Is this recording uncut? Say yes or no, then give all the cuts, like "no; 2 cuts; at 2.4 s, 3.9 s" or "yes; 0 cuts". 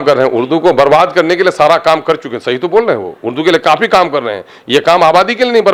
yes; 0 cuts